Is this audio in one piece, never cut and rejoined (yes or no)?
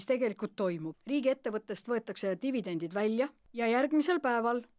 no